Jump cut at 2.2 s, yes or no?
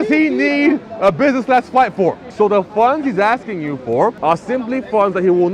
yes